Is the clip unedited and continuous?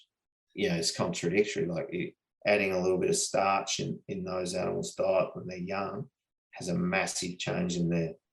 no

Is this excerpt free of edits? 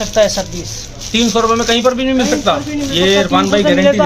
yes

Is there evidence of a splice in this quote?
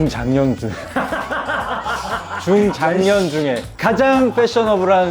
yes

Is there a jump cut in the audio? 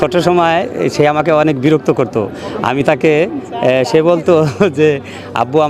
no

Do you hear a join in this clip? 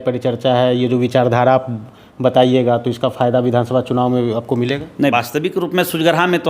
yes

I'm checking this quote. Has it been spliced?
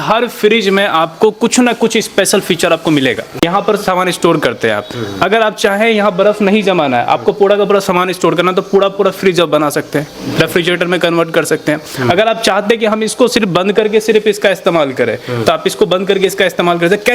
yes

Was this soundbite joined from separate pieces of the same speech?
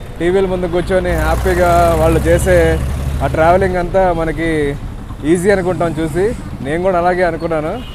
no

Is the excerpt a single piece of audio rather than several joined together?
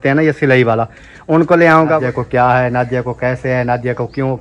no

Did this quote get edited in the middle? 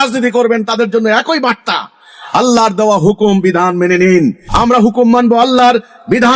yes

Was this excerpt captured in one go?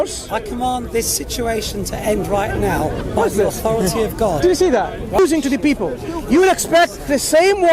no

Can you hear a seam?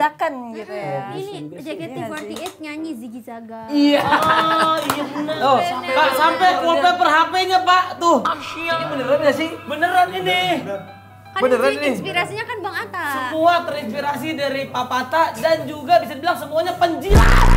yes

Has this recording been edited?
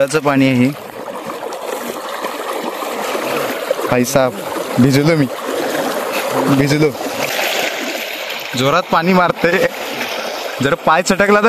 yes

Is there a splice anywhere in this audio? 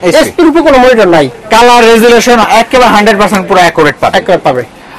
no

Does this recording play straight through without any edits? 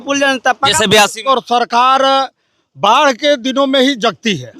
no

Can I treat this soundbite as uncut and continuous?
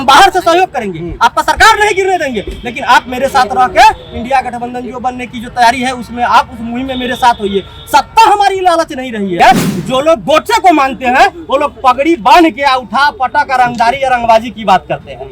no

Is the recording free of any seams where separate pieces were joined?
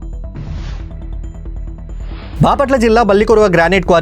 no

